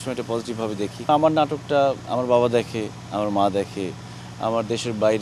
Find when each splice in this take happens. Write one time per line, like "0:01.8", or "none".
0:01.1